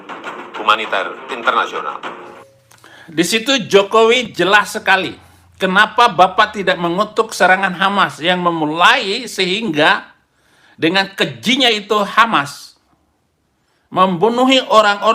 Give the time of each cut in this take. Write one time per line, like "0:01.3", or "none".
0:02.4